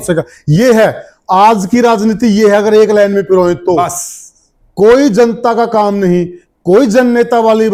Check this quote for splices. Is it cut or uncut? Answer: uncut